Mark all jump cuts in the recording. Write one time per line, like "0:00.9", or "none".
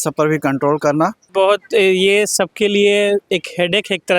0:01.3